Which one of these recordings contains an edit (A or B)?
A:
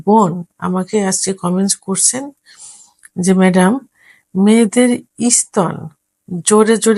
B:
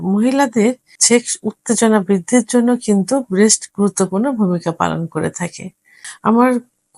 B